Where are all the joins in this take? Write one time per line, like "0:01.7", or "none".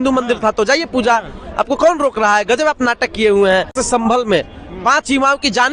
0:03.8